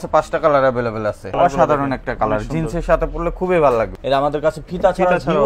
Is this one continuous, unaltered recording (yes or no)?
no